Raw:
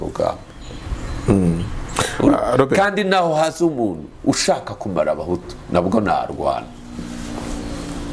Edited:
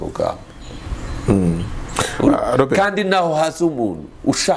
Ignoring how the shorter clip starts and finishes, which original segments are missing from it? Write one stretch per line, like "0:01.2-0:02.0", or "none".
none